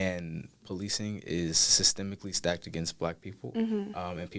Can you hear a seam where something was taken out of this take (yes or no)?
no